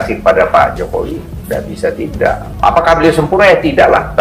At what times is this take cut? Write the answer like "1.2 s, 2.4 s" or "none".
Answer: 2.5 s